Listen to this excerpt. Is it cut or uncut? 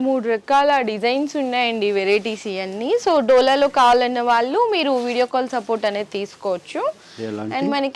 uncut